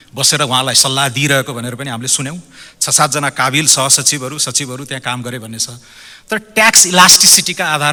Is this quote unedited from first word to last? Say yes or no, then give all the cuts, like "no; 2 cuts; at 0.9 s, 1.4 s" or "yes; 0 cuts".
yes; 0 cuts